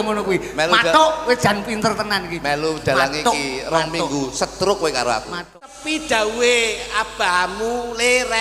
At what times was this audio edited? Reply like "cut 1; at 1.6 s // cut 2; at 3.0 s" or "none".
cut 1; at 5.7 s